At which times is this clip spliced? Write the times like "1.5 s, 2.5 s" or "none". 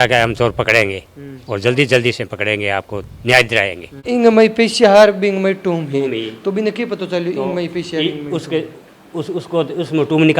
3.9 s